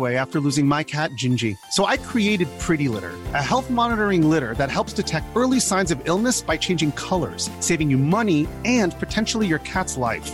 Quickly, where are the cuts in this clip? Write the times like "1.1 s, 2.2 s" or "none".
none